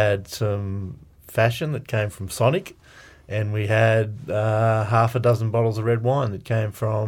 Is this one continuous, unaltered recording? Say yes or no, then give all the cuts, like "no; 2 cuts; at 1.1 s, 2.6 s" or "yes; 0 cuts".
yes; 0 cuts